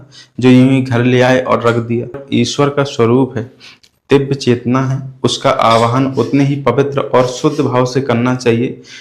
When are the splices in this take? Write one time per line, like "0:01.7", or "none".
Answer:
0:02.2